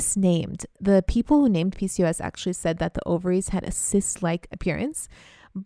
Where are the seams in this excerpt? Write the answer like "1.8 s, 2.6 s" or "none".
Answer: 4.5 s